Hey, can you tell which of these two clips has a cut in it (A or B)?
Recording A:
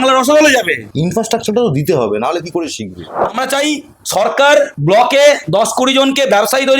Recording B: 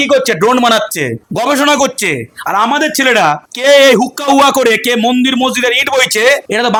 A